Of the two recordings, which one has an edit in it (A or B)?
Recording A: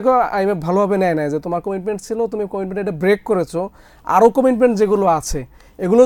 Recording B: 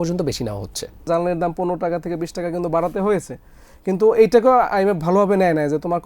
B